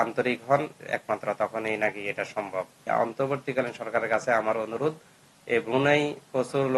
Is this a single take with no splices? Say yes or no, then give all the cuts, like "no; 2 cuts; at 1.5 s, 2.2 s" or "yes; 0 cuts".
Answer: no; 1 cut; at 2.9 s